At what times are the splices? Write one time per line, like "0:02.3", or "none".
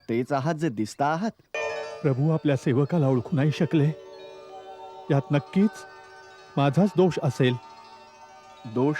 0:01.5